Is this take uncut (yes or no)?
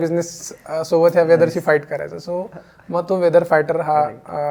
yes